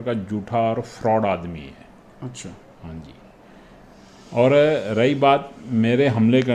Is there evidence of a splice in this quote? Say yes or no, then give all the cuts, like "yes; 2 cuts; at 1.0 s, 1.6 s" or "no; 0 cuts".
no; 0 cuts